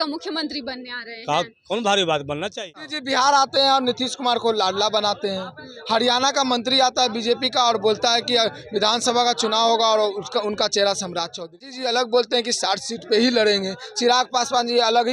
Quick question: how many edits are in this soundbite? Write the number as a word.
two